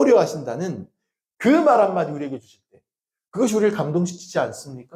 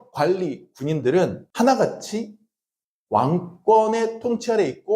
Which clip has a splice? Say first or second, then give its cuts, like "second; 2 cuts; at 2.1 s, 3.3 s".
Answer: second; 1 cut; at 1.4 s